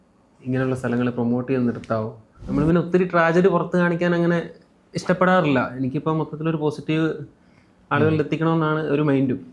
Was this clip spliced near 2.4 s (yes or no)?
yes